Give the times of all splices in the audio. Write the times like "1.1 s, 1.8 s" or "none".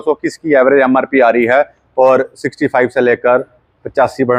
none

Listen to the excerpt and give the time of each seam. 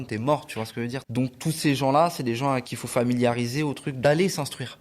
1.1 s, 2.8 s, 4.0 s

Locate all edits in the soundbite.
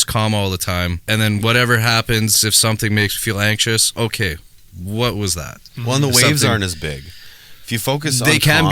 1.0 s

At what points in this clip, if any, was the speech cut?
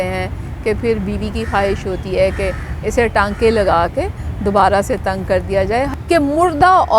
5.9 s

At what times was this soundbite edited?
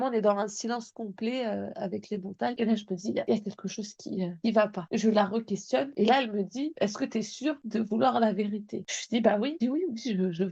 none

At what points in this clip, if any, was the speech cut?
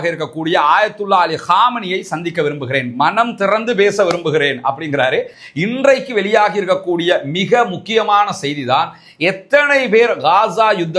5.4 s

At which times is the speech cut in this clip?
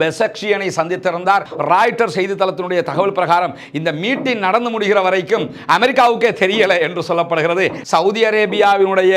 1.5 s, 7.8 s

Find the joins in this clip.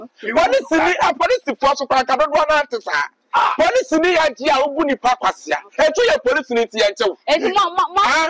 none

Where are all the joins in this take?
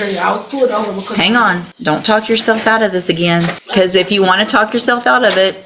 1.7 s, 3.6 s

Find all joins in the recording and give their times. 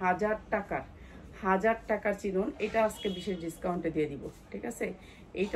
none

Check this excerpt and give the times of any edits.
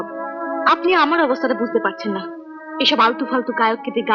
none

